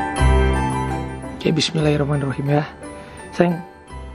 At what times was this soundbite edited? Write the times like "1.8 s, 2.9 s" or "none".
1.1 s